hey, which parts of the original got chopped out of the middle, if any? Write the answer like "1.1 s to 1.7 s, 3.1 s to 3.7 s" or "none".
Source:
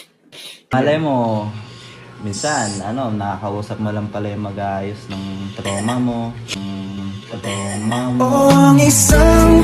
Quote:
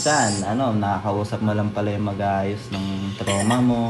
none